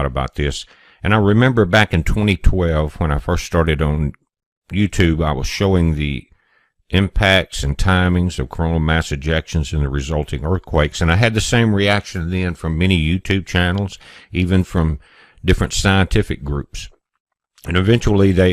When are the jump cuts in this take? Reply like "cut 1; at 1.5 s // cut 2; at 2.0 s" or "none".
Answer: cut 1; at 2.3 s